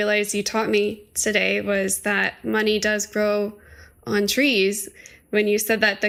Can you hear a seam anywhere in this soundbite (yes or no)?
no